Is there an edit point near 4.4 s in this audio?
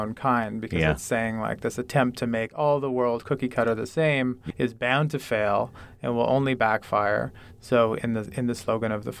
yes; 1 cut; at 4.4 s

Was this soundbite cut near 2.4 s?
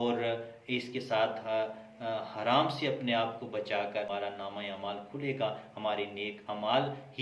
no; 1 cut; at 4.1 s

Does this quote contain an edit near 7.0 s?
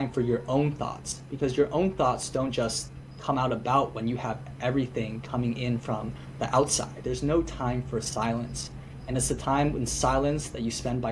yes; 1 cut; at 7.0 s

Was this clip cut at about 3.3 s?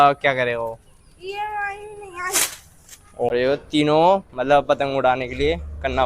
yes; 1 cut; at 3.3 s

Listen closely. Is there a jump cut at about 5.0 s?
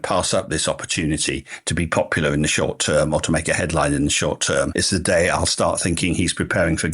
no; 0 cuts

